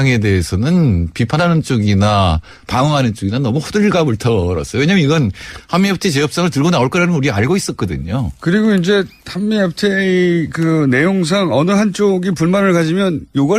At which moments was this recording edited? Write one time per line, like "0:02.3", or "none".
none

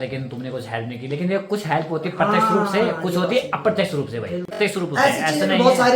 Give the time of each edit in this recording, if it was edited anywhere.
0:04.6

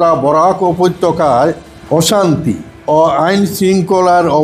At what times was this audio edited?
0:01.7
0:02.7

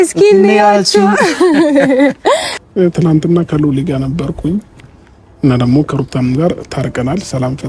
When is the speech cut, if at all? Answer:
0:02.5

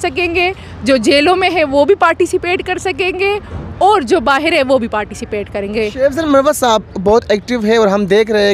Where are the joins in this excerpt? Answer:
none

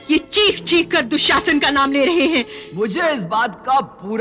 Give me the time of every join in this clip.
0:02.6

